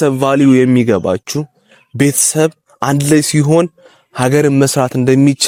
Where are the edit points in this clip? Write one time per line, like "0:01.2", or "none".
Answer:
none